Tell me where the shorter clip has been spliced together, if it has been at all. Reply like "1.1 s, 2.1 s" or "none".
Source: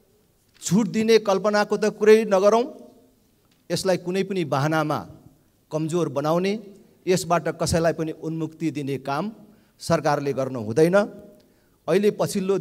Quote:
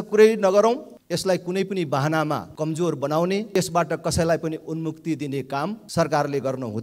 0.9 s, 2.5 s, 3.5 s, 5.8 s